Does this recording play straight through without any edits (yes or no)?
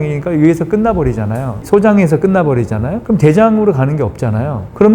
yes